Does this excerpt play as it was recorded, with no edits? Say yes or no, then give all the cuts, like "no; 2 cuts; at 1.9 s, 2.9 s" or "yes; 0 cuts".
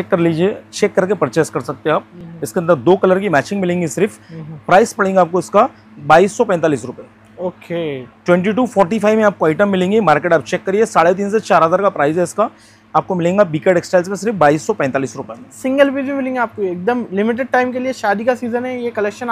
yes; 0 cuts